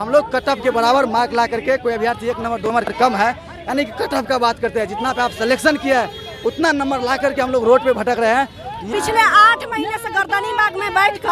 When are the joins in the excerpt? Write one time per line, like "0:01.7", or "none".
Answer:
0:08.9